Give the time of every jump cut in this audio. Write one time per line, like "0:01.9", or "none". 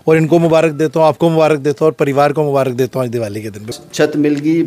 0:03.7